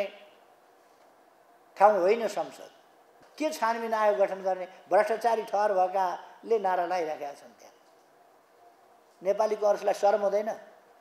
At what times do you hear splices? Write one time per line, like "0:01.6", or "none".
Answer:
0:03.1